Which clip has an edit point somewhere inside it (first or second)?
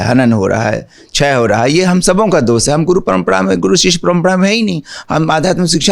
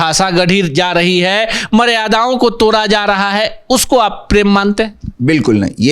first